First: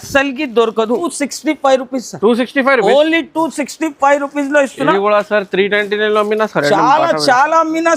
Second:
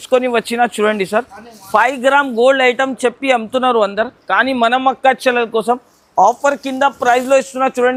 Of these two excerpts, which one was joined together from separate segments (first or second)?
first